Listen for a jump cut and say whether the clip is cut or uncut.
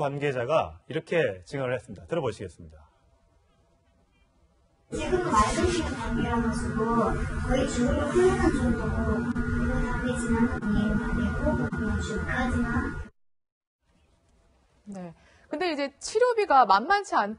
cut